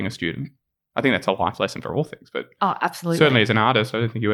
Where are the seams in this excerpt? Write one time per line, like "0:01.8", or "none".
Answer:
none